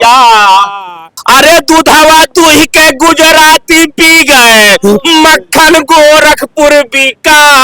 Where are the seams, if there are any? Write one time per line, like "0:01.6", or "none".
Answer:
0:01.1